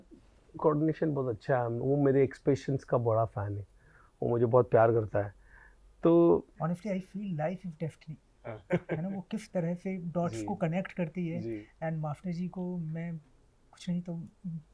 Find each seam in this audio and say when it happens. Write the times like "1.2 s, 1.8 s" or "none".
6.5 s